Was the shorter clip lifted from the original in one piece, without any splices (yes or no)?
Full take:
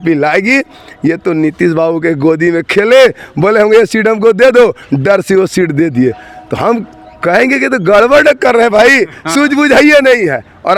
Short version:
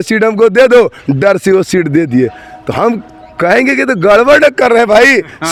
yes